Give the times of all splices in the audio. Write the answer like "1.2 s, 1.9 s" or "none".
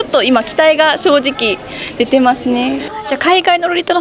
2.9 s